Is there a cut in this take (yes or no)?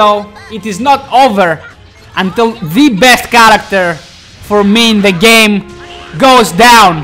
no